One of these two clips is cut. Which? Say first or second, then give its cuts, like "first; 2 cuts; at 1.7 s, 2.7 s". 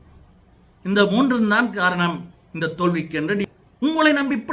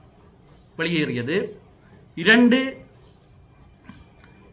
first; 1 cut; at 3.5 s